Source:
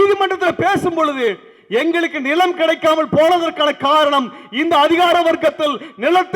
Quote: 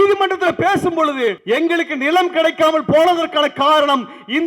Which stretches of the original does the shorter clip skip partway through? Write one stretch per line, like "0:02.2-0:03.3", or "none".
0:01.4-0:01.6